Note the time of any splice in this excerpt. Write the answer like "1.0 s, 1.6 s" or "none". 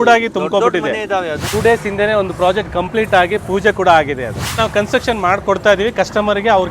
1.5 s, 4.6 s